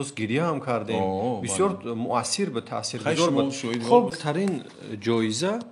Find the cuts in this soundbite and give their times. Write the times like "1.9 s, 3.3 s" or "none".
4.2 s